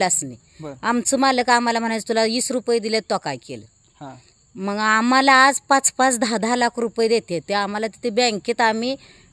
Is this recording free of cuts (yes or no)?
yes